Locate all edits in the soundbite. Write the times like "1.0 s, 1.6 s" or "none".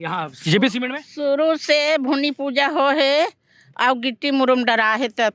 none